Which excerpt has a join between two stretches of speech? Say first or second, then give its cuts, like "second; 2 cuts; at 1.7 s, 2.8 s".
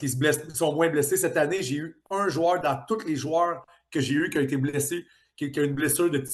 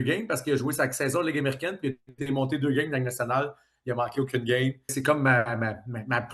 second; 1 cut; at 5.0 s